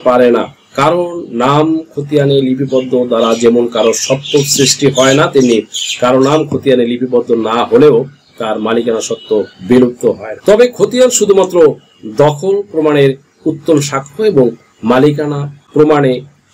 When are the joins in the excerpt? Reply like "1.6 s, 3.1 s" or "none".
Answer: none